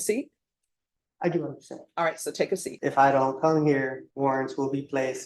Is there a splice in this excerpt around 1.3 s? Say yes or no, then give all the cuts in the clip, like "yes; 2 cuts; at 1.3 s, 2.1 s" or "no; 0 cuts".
no; 2 cuts; at 2.7 s, 4.0 s